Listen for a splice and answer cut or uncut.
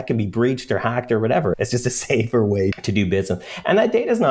cut